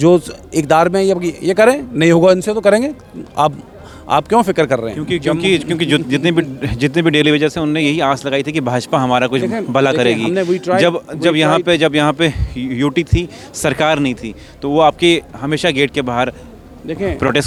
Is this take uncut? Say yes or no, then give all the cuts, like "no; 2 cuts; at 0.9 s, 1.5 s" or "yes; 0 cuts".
yes; 0 cuts